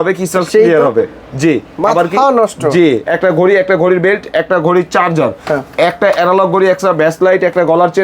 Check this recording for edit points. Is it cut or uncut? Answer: cut